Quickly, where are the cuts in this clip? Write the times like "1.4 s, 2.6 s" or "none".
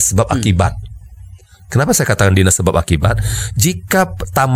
none